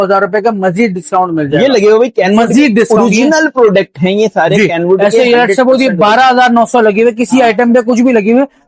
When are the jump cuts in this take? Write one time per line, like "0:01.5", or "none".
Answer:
none